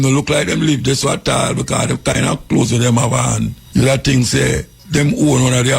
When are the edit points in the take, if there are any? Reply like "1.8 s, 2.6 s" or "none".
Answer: 3.6 s, 4.7 s

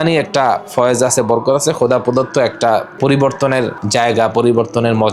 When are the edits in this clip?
2.9 s, 3.8 s

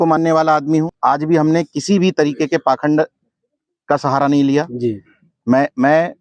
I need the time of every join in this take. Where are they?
0.9 s

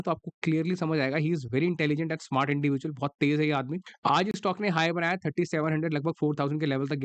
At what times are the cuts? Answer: 3.8 s

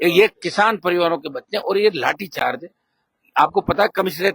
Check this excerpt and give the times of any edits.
none

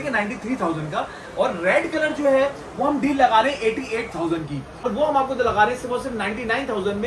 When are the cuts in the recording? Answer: 4.9 s

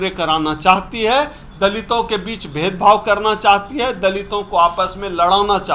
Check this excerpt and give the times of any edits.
none

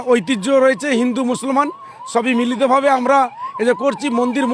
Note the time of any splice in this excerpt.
none

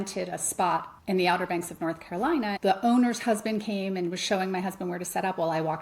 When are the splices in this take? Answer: 0.9 s, 2.5 s

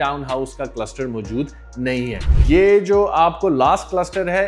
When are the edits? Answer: 2.3 s

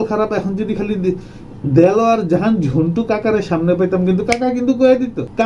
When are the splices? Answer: none

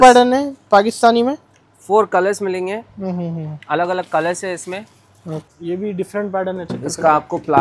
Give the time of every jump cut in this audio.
5.5 s

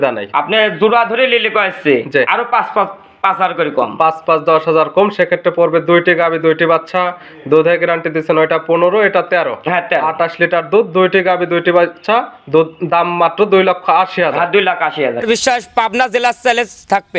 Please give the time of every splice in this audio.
15.2 s

